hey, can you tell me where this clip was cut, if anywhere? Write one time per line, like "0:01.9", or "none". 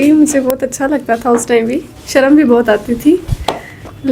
none